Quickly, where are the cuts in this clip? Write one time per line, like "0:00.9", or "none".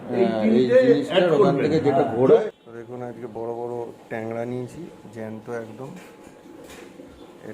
0:02.5